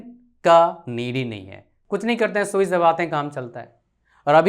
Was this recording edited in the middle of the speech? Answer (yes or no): yes